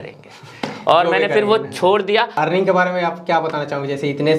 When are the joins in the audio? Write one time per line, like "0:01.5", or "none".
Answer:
0:02.3